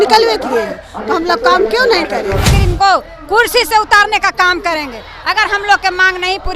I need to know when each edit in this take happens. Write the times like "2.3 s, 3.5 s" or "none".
2.6 s